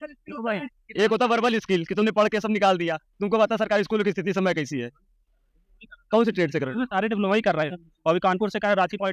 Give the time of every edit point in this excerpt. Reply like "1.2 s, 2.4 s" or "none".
none